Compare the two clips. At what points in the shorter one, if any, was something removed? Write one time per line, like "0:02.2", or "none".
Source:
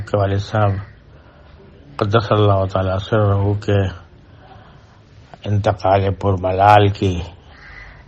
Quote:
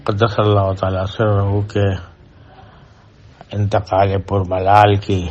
none